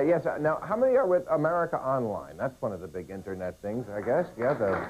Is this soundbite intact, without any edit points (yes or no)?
yes